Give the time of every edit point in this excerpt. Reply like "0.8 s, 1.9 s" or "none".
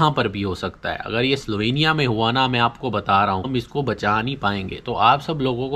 3.5 s